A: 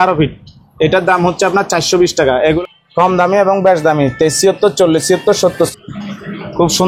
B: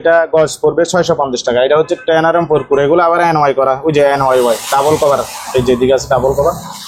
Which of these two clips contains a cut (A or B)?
A